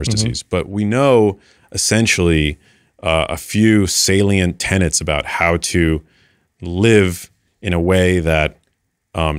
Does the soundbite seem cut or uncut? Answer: uncut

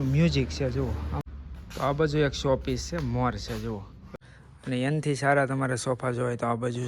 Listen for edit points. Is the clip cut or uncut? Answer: cut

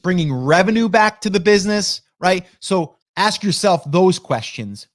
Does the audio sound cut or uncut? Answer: cut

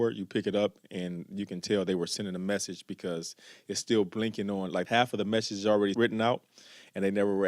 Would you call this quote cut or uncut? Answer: cut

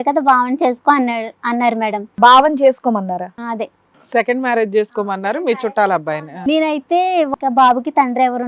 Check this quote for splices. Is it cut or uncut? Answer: cut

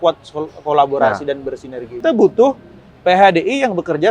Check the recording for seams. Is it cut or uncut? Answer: cut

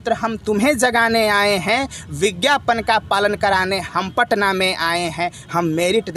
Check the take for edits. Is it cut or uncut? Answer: uncut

